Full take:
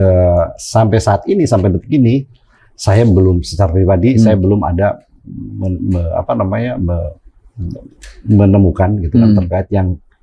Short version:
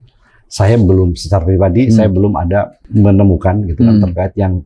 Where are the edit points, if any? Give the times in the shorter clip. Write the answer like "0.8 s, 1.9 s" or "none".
2.8 s